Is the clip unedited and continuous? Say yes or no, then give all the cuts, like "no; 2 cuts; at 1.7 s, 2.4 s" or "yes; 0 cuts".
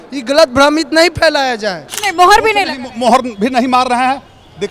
no; 1 cut; at 2.0 s